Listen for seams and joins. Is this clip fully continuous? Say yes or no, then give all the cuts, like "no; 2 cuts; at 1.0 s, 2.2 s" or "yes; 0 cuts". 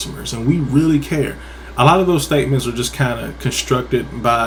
yes; 0 cuts